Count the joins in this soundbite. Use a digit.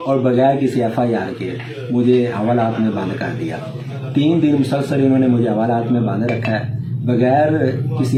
0